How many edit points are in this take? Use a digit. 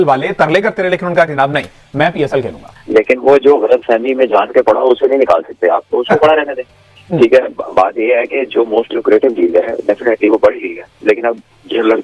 1